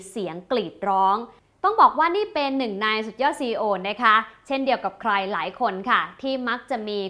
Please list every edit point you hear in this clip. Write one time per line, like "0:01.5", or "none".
0:01.4